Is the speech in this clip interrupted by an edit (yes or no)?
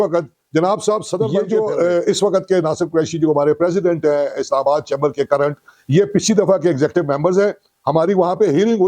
yes